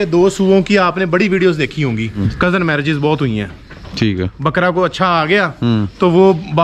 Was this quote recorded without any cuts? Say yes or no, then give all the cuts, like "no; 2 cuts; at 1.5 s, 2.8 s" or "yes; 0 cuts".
no; 1 cut; at 2.2 s